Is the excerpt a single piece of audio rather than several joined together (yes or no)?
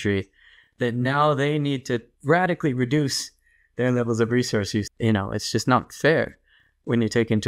no